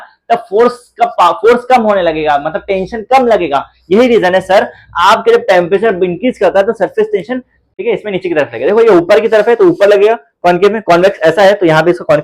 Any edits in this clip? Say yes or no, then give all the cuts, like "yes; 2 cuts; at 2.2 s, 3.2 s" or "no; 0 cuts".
yes; 1 cut; at 7.6 s